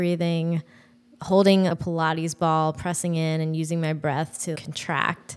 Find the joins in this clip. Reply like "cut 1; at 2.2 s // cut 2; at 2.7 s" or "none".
cut 1; at 1.7 s // cut 2; at 4.6 s